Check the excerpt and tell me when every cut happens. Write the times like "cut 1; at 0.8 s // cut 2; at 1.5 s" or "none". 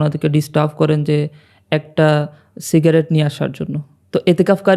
none